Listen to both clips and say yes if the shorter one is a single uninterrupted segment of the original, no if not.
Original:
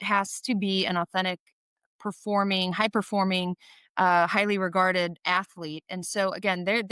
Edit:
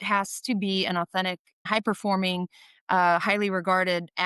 no